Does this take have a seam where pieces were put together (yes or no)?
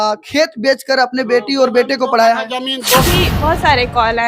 yes